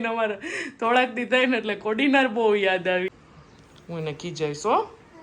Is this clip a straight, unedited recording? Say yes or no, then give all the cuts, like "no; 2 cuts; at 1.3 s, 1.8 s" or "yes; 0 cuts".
no; 1 cut; at 3.1 s